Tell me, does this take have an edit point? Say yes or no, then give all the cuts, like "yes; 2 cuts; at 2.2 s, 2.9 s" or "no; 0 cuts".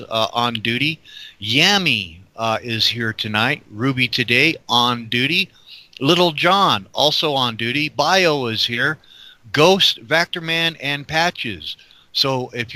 no; 0 cuts